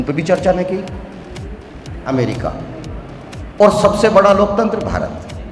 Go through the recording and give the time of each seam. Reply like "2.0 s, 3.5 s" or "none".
1.9 s